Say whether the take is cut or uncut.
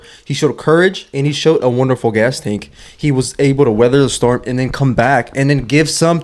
uncut